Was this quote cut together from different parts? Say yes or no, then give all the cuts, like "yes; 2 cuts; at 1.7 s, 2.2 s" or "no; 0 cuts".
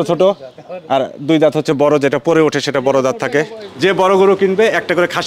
yes; 1 cut; at 3.6 s